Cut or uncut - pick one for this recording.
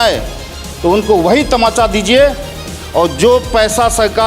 cut